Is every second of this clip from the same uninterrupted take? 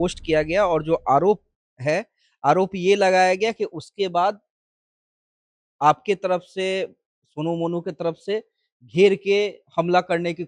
yes; 0 cuts

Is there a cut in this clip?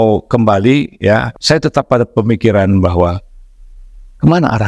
yes; 1 cut; at 1.3 s

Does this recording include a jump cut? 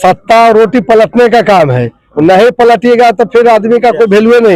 no; 0 cuts

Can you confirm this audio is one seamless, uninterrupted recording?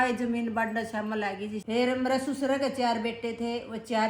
no; 1 cut; at 1.6 s

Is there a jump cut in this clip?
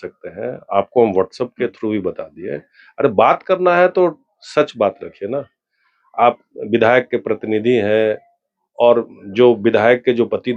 no; 0 cuts

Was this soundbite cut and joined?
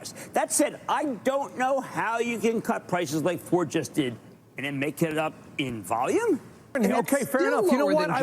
yes; 1 cut; at 6.8 s

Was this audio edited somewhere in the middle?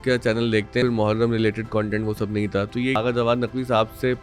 yes; 2 cuts; at 0.8 s, 3.0 s

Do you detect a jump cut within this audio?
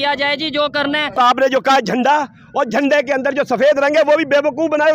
yes; 1 cut; at 1.2 s

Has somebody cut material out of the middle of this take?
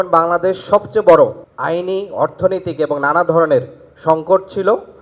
yes; 1 cut; at 1.5 s

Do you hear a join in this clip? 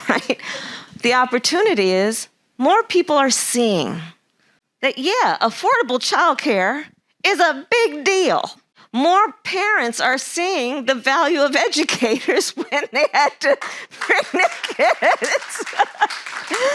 no; 0 cuts

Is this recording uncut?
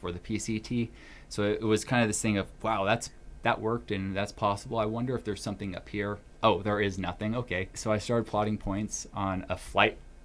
no; 2 cuts; at 6.2 s, 7.7 s

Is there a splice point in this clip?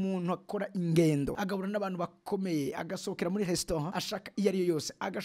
yes; 2 cuts; at 1.3 s, 4.0 s

